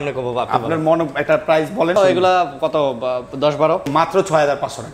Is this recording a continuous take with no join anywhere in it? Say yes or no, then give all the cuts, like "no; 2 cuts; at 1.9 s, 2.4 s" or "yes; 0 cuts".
no; 2 cuts; at 2.0 s, 3.9 s